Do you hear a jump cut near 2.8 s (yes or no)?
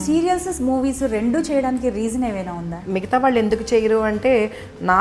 yes